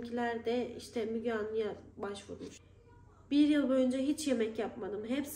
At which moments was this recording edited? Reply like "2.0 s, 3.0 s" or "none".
2.6 s